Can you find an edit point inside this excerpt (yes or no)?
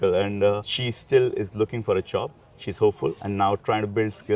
no